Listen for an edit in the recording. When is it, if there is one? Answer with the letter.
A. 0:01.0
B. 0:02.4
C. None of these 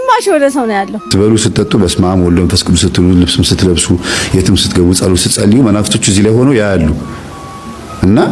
A